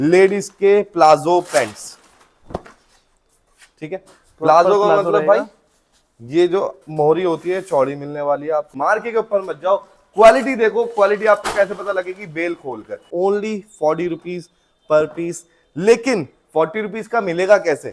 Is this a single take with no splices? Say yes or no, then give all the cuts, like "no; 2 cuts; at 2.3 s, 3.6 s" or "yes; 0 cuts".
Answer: no; 2 cuts; at 8.7 s, 13.1 s